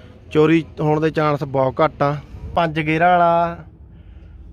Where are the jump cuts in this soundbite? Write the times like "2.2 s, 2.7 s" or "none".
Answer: 2.5 s